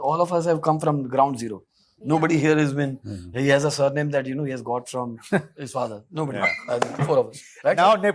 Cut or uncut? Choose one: uncut